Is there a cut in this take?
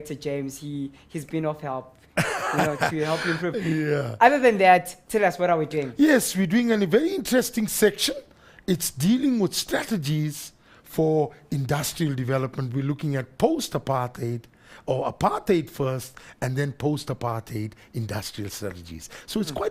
yes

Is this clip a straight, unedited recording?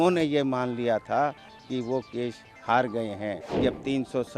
no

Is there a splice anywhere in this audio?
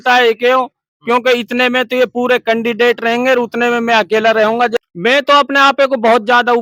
yes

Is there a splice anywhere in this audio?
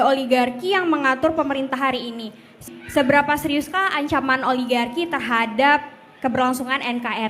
yes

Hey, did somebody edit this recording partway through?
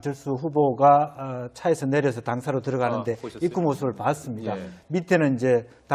no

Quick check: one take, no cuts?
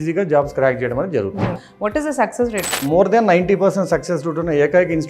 no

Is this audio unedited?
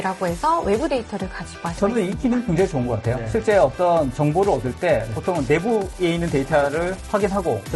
no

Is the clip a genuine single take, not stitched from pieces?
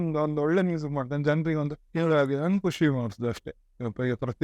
no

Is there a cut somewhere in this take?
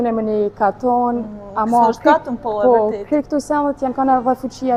no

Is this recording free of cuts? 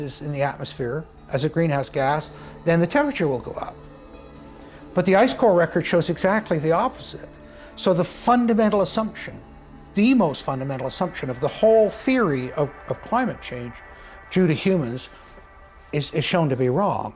yes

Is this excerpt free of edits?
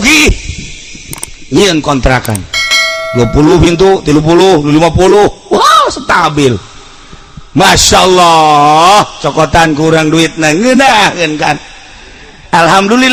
yes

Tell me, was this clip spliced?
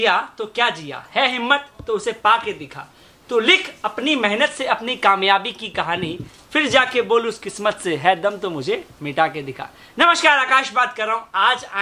no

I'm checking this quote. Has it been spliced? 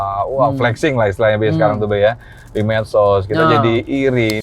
no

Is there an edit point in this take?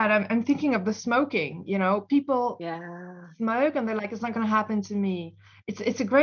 no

